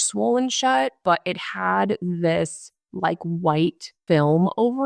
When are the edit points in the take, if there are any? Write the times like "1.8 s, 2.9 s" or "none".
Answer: 1.0 s, 4.0 s